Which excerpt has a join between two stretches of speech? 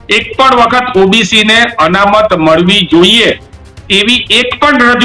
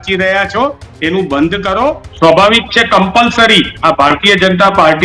second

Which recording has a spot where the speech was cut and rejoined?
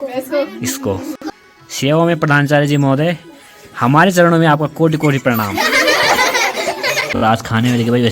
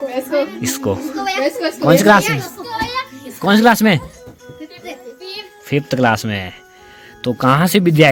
first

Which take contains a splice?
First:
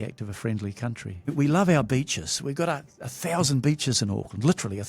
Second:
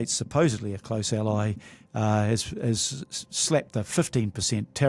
first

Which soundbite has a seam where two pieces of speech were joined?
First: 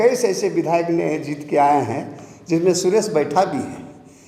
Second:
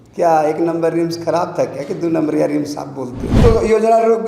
second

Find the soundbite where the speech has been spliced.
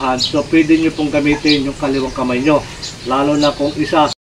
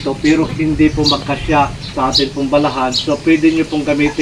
second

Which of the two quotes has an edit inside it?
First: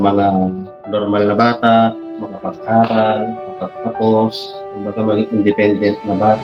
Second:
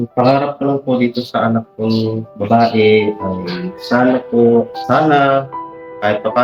second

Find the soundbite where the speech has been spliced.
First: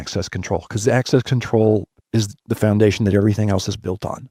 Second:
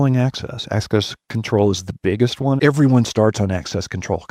second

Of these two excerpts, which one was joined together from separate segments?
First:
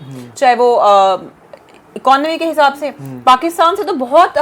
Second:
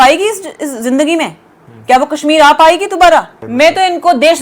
second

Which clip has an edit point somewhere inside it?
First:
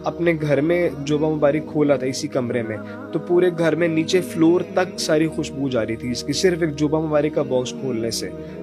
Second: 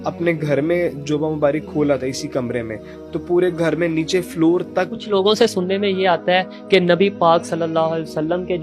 second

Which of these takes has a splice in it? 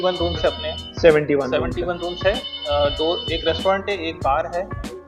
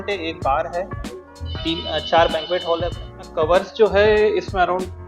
second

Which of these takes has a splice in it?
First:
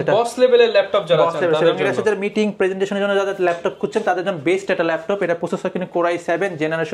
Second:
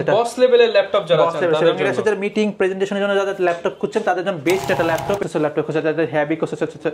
second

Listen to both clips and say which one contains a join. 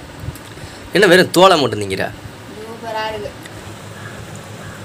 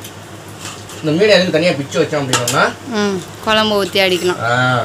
first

